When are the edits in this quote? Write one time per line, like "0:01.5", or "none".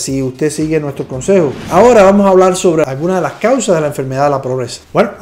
0:01.6